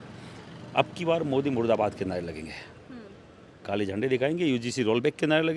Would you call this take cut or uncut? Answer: uncut